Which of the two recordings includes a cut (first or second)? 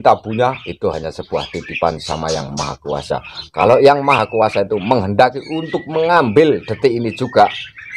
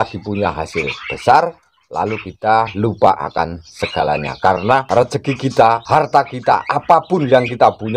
second